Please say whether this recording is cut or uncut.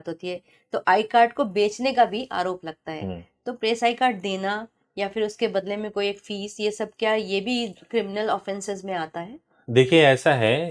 uncut